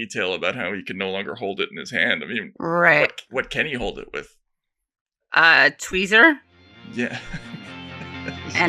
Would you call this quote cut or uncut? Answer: uncut